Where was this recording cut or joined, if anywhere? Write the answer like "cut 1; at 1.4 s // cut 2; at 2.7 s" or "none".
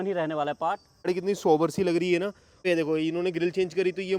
cut 1; at 1.1 s // cut 2; at 2.6 s